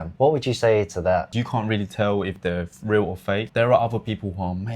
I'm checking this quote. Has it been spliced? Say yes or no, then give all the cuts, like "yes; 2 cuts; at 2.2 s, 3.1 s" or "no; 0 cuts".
yes; 1 cut; at 3.5 s